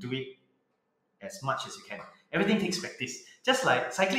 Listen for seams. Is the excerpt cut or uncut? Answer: uncut